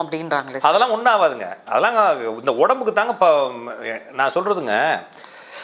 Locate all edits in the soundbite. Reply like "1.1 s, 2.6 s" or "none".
none